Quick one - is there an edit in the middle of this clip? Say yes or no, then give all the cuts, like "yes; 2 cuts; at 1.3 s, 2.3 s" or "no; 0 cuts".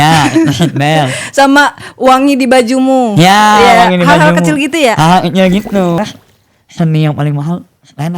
yes; 1 cut; at 6.0 s